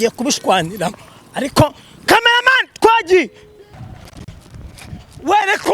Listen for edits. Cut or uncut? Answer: cut